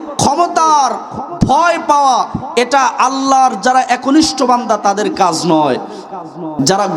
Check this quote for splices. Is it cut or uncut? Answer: uncut